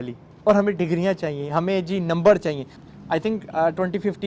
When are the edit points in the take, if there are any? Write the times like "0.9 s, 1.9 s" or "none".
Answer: 2.7 s